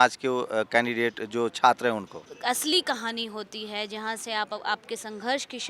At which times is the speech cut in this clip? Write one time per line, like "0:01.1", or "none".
0:02.3